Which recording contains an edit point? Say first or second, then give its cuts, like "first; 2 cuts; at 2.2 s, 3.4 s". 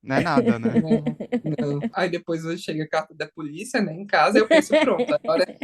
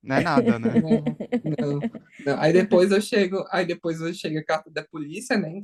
first; 1 cut; at 1.9 s